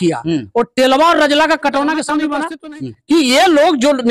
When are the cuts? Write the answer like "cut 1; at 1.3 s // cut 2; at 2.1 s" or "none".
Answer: cut 1; at 2.3 s